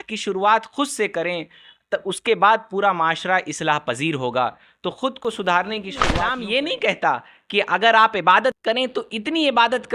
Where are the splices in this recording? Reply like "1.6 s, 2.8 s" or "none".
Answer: 6.2 s